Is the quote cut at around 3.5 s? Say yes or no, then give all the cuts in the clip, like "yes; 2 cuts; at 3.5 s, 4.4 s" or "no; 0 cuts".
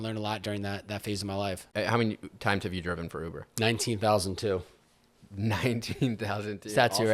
no; 1 cut; at 1.7 s